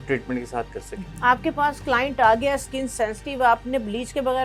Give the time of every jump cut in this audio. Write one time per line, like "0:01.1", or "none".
0:01.1